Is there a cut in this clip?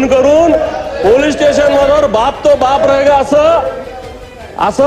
no; 0 cuts

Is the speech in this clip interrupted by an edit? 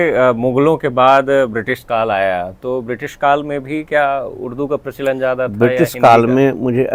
no; 0 cuts

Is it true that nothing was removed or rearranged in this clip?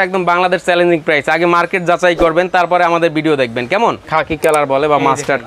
no; 1 cut; at 4.0 s

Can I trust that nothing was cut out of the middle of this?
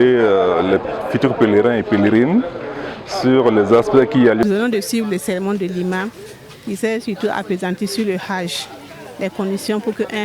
no; 1 cut; at 4.4 s

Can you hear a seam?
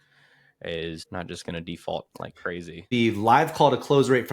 yes; 2 cuts; at 1.0 s, 2.8 s

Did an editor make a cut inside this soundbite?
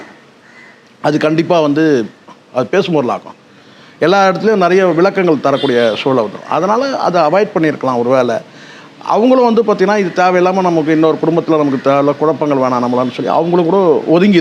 no; 0 cuts

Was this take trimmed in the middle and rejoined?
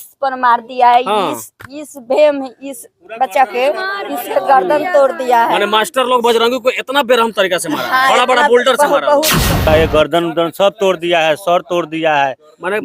yes; 1 cut; at 9.7 s

